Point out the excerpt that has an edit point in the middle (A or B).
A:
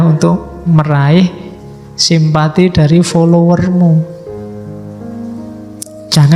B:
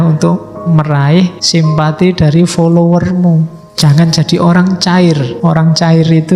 B